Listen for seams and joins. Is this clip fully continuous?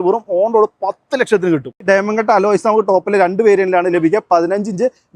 no; 1 cut; at 1.8 s

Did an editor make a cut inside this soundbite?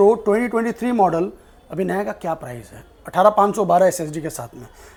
no; 0 cuts

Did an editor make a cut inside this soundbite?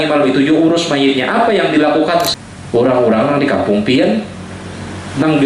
yes; 1 cut; at 2.3 s

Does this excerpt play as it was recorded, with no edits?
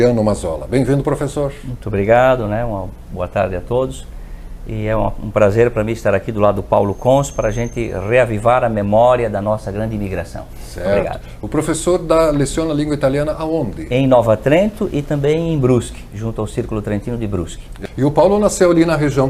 no; 1 cut; at 17.7 s

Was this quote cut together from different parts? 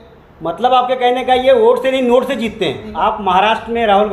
yes; 1 cut; at 2.9 s

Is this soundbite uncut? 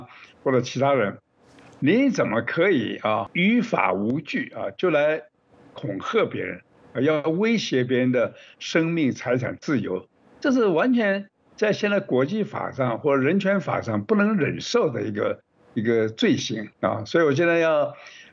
no; 1 cut; at 3.3 s

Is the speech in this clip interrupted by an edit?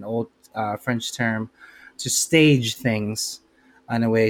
no; 0 cuts

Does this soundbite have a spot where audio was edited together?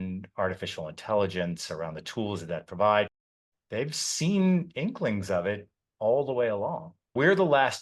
no; 0 cuts

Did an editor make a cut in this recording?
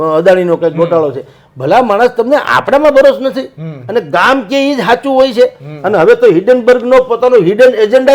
no; 0 cuts

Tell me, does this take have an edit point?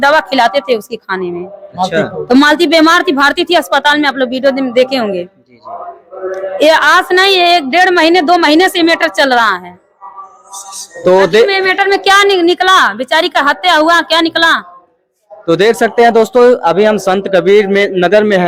no; 0 cuts

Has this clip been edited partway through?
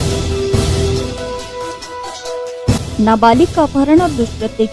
yes; 1 cut; at 1.5 s

